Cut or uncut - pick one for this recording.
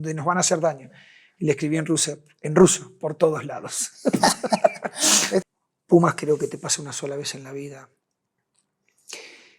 cut